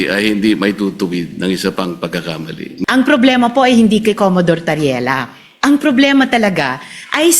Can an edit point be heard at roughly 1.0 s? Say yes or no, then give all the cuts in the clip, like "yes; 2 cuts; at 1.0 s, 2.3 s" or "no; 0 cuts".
no; 1 cut; at 2.8 s